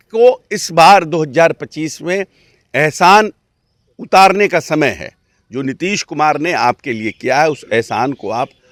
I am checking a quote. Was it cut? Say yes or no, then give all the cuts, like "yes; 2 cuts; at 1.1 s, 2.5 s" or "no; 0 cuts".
no; 0 cuts